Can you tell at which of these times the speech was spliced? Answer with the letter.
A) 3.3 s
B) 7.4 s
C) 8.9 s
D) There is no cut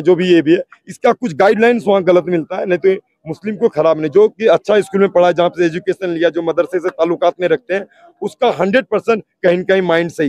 D